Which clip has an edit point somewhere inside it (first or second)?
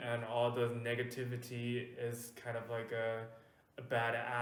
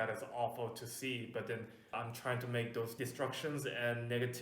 second